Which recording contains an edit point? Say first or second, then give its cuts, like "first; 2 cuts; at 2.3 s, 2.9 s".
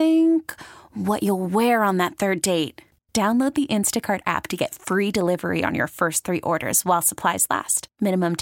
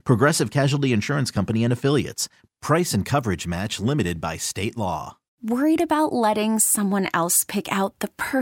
second; 1 cut; at 5.4 s